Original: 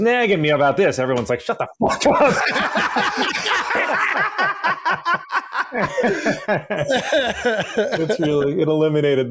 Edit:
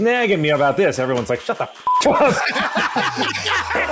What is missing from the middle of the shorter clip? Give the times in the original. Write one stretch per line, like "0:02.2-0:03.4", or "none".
none